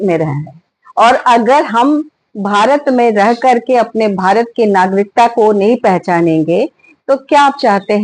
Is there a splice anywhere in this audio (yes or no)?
no